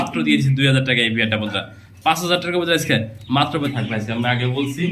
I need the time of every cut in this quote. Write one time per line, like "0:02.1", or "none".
0:03.7